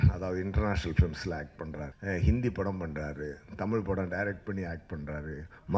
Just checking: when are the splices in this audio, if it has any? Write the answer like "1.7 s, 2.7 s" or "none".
1.9 s

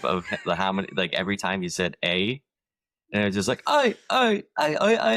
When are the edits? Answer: none

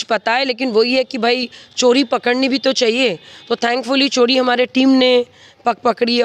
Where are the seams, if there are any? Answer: none

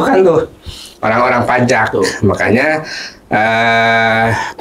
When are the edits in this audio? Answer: none

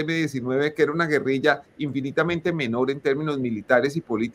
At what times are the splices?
none

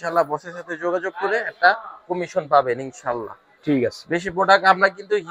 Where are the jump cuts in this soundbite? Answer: none

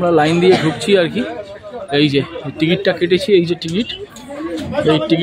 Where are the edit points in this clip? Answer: none

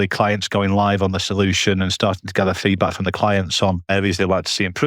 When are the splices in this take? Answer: 3.9 s

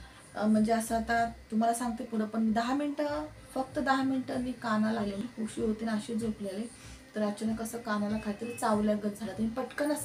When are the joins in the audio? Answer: 5.3 s

